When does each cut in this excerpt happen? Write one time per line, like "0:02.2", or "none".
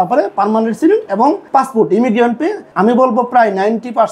0:01.4
0:02.6